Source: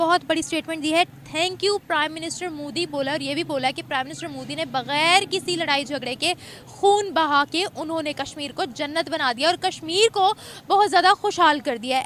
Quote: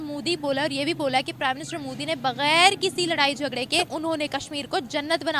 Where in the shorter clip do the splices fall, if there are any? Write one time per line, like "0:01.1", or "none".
0:03.9